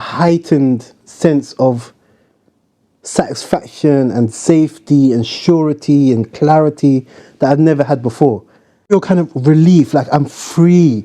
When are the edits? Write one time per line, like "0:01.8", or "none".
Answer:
0:08.9